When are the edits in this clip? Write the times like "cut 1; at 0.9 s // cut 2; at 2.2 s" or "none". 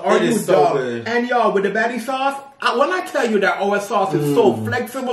none

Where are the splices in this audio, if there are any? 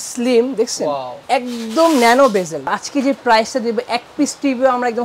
cut 1; at 2.8 s

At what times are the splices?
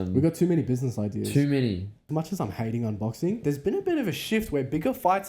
cut 1; at 2.0 s

